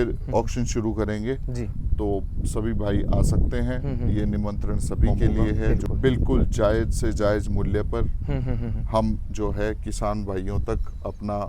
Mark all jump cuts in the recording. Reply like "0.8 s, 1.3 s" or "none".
5.8 s